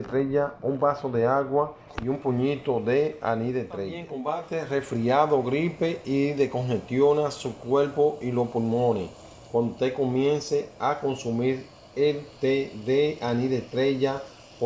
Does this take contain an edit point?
yes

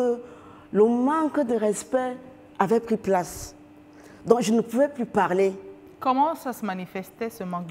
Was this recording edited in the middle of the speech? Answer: yes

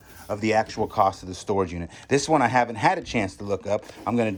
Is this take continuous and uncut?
yes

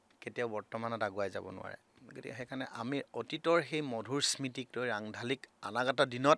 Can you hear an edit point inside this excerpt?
no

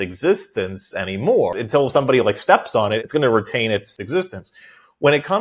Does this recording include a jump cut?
yes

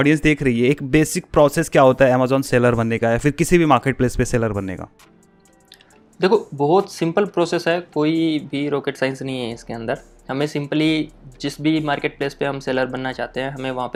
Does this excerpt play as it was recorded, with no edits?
yes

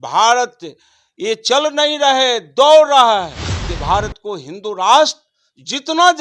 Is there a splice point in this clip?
yes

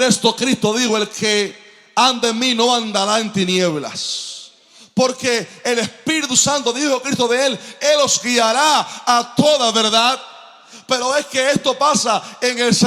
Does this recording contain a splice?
no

